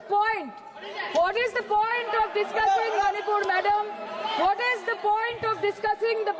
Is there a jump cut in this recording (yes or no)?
no